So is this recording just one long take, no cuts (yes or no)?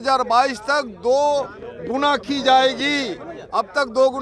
yes